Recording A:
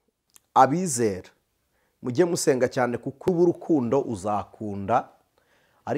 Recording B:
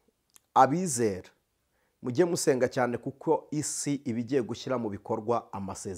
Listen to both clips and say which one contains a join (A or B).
A